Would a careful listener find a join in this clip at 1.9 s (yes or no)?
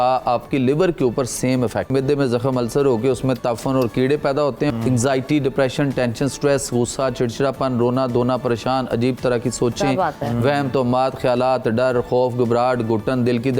yes